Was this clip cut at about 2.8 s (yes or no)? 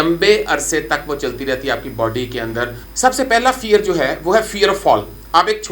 yes